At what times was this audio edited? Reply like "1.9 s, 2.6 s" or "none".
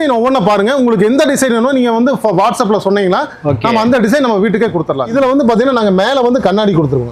5.1 s